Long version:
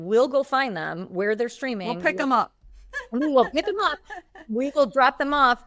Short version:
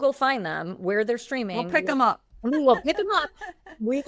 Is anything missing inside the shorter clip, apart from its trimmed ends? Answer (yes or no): yes